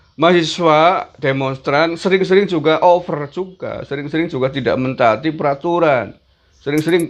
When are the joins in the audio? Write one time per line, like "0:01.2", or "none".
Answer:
none